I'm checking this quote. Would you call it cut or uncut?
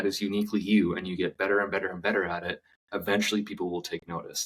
uncut